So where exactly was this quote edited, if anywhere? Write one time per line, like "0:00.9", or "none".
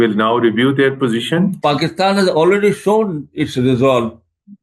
0:01.5